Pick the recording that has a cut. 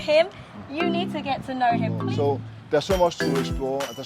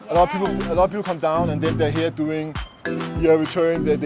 first; 1 cut; at 2.0 s

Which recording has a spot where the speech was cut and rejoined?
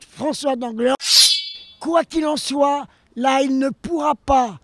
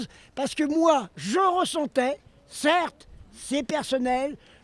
first; 1 cut; at 1.4 s

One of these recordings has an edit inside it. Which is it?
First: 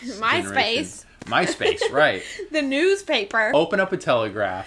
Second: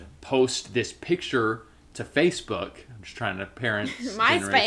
first; 1 cut; at 3.5 s

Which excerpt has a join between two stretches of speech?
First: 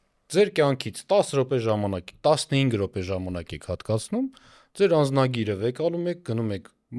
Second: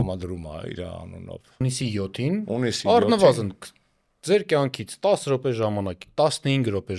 second; 1 cut; at 1.6 s

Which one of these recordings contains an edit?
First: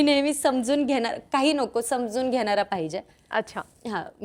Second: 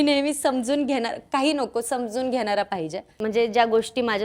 second; 1 cut; at 3.0 s

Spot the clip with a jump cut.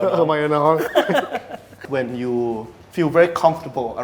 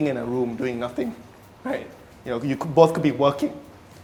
first; 1 cut; at 1.8 s

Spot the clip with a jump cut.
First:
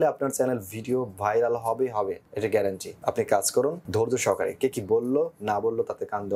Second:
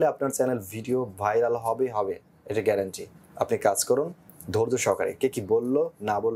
first; 3 cuts; at 2.3 s, 2.9 s, 3.8 s

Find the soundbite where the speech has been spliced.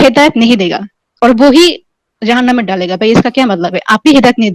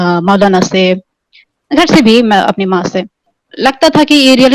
second; 1 cut; at 3.3 s

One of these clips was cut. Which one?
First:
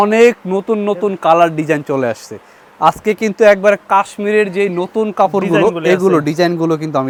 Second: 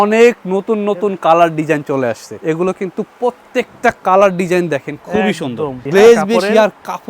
second; 2 cuts; at 2.3 s, 5.8 s

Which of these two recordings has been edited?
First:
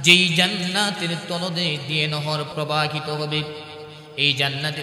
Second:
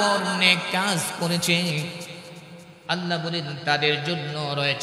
first; 1 cut; at 2.5 s

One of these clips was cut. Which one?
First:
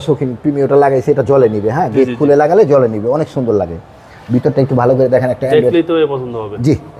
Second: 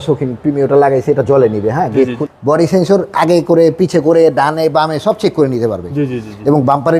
second; 1 cut; at 2.2 s

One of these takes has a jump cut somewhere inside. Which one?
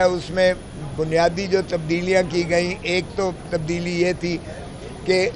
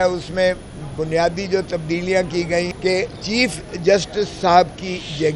second; 1 cut; at 2.7 s

